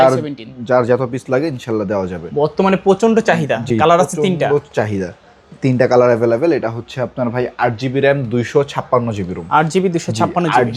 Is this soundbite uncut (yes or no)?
yes